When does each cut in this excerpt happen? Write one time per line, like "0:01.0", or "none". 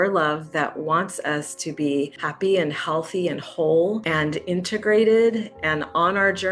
0:02.2
0:04.0